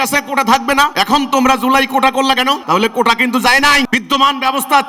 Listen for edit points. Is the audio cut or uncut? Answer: cut